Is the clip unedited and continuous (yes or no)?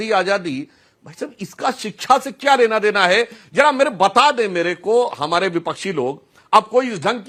yes